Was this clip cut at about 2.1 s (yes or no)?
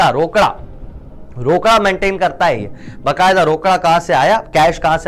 no